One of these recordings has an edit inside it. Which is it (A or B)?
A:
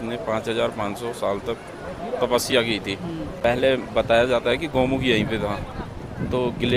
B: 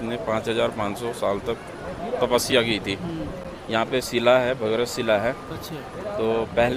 A